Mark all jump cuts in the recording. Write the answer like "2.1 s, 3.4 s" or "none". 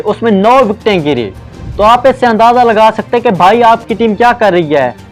none